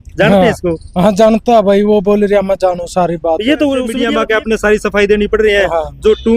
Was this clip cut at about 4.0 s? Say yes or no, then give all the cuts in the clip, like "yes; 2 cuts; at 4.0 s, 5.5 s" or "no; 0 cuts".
yes; 1 cut; at 4.0 s